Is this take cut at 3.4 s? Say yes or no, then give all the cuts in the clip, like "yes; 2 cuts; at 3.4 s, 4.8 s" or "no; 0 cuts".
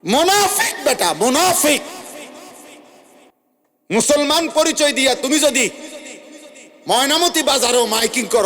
yes; 1 cut; at 3.4 s